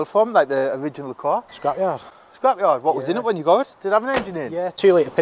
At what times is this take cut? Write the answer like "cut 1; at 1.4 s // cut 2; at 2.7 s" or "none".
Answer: cut 1; at 1.5 s